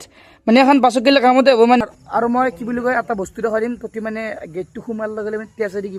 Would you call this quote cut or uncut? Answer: cut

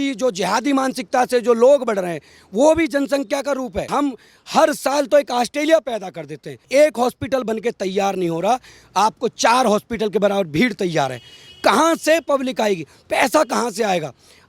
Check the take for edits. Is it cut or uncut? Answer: cut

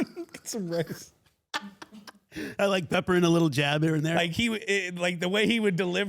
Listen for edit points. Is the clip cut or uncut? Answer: cut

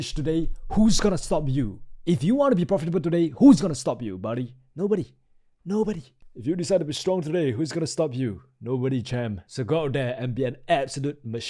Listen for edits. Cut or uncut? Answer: uncut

